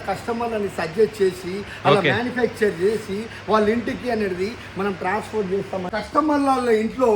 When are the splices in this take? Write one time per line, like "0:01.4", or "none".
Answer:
0:05.9